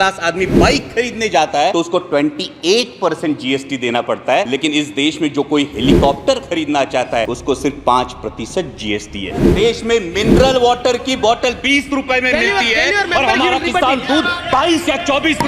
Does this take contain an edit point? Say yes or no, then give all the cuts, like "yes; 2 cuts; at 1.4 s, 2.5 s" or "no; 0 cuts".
yes; 4 cuts; at 1.7 s, 4.5 s, 7.3 s, 9.5 s